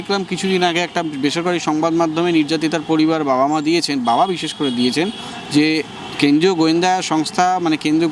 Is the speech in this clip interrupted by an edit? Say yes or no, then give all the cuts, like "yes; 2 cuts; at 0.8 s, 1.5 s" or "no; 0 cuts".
no; 0 cuts